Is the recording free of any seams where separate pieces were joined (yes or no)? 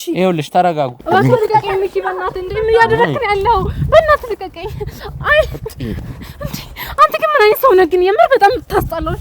yes